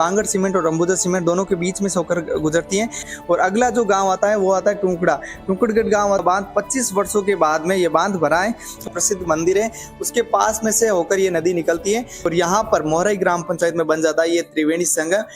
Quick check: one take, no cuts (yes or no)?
no